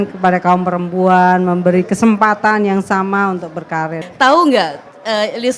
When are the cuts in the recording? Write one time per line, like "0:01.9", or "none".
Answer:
0:04.0